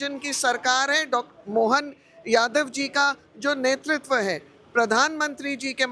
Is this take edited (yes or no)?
no